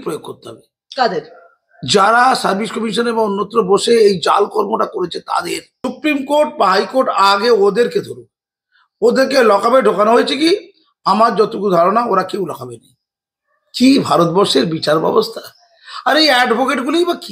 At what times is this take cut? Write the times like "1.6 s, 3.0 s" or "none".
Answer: 5.7 s